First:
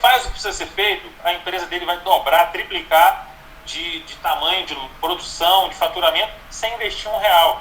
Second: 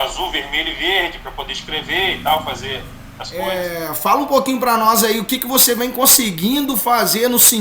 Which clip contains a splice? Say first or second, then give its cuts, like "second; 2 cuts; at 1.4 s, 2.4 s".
second; 1 cut; at 3.5 s